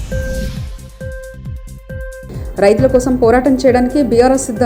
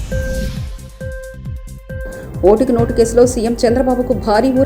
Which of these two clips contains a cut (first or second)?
first